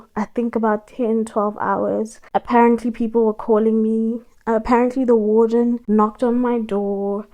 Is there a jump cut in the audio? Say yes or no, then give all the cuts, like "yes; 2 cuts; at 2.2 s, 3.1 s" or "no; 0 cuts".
no; 0 cuts